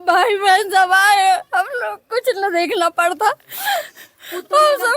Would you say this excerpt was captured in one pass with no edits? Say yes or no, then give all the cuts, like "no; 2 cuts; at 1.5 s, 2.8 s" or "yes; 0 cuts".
yes; 0 cuts